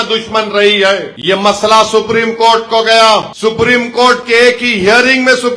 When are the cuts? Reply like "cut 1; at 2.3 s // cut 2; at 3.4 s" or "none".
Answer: cut 1; at 1.1 s // cut 2; at 3.3 s